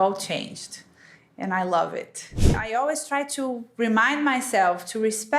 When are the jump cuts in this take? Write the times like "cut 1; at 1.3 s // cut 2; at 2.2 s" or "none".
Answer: cut 1; at 2.5 s